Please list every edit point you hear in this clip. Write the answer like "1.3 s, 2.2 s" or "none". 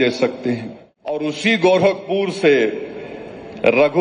1.2 s